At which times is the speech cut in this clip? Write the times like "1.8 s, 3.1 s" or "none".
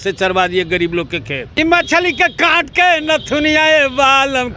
1.4 s